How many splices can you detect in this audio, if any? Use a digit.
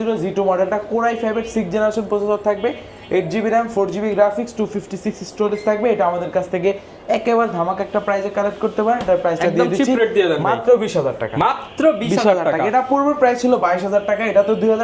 0